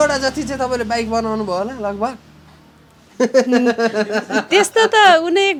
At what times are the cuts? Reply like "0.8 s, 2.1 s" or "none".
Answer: none